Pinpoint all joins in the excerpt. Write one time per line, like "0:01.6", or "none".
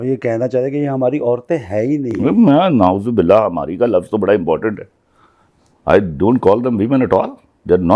none